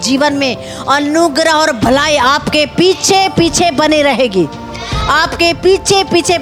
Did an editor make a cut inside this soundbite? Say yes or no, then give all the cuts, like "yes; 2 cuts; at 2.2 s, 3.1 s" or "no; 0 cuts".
no; 0 cuts